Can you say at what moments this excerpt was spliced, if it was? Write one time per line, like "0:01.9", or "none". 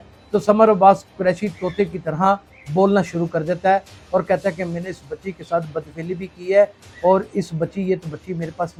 none